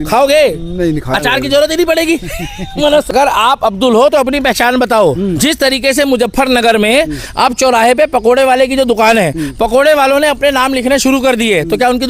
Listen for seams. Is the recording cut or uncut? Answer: cut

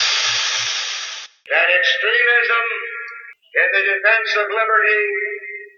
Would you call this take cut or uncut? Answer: uncut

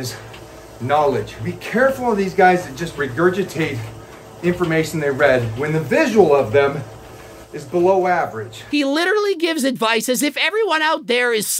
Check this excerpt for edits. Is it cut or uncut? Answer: cut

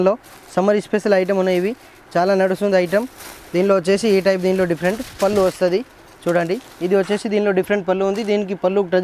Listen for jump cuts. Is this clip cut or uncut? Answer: uncut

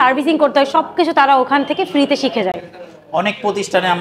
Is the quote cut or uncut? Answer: uncut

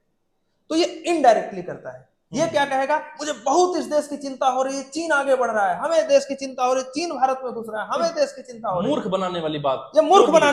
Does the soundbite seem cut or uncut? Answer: uncut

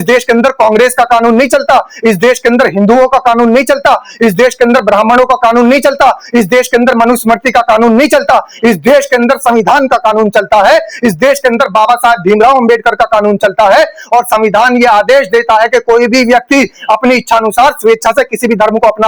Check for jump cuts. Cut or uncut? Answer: uncut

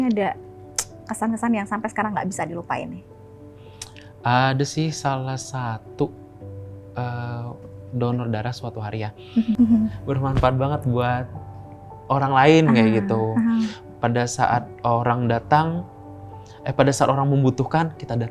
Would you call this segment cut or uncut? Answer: cut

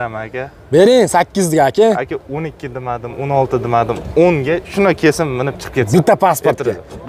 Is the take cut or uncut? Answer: uncut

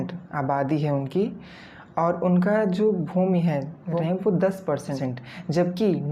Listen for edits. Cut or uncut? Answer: cut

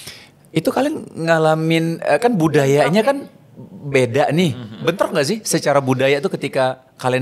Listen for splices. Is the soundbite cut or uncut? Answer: uncut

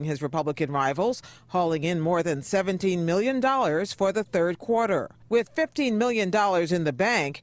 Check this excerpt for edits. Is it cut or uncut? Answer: uncut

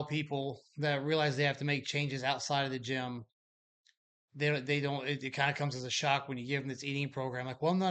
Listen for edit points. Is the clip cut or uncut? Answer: uncut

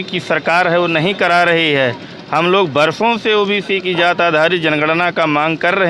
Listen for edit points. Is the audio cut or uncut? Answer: uncut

